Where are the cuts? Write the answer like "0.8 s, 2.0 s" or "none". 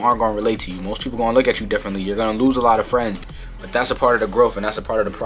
3.2 s

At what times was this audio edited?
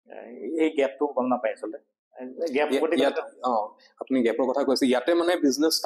none

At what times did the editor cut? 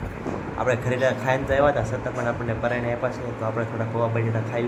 none

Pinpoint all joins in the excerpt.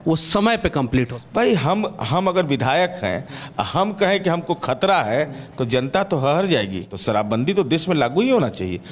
1.2 s, 6.8 s

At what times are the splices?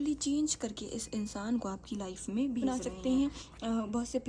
2.6 s

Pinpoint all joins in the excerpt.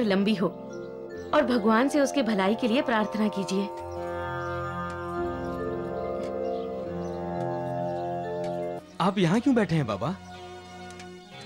8.8 s

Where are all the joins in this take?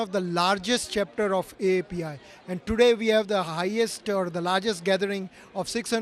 none

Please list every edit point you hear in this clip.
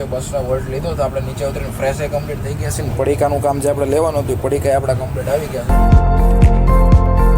5.6 s

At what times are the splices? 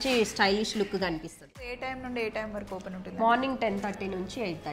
1.6 s

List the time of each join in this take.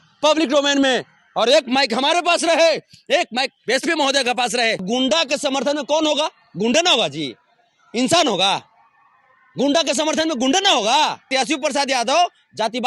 4.8 s, 11.2 s

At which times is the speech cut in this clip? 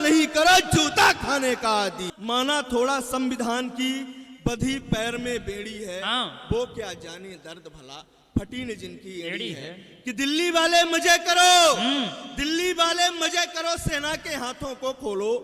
2.0 s

